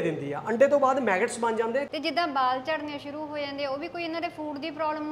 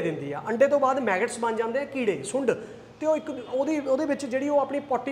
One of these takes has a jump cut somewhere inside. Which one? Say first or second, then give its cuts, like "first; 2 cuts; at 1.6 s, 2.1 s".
first; 1 cut; at 1.9 s